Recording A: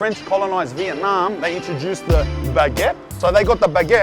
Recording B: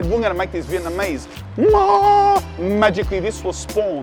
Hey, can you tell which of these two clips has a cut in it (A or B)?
A